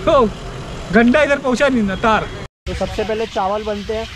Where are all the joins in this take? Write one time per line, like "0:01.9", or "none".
0:02.4